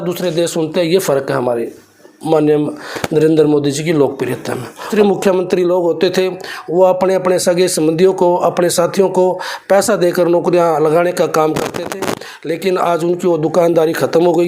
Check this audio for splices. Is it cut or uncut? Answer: cut